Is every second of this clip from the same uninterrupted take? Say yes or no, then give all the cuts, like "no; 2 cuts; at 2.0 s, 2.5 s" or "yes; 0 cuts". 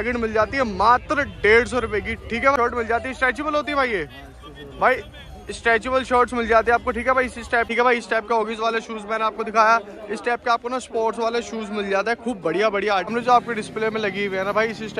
no; 3 cuts; at 2.6 s, 7.7 s, 13.1 s